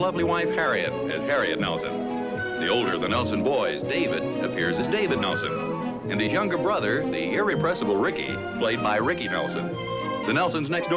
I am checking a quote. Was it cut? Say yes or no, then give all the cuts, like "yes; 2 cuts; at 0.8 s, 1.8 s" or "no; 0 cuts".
no; 0 cuts